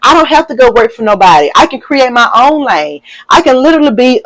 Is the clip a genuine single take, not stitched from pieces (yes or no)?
yes